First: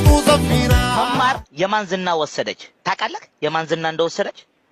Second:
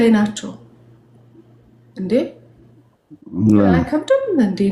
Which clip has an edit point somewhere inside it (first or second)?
first